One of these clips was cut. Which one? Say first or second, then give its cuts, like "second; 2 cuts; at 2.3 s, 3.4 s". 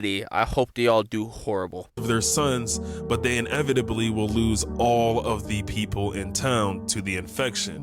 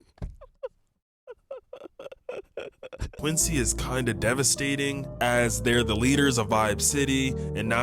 second; 1 cut; at 3.2 s